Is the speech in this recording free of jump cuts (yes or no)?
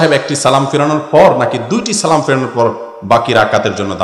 yes